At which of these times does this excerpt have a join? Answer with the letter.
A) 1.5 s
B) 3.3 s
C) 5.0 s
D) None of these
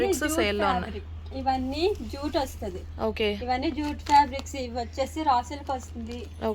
D